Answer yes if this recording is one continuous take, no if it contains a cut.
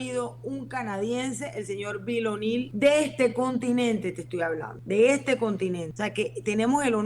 no